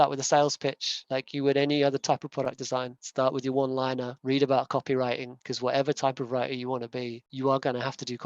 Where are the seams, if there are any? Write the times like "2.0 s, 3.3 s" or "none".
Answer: none